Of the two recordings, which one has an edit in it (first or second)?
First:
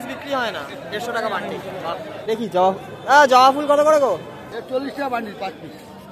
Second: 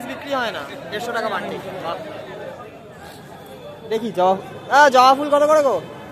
first